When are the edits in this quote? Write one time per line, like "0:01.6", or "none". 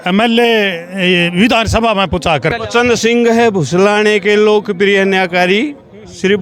0:02.6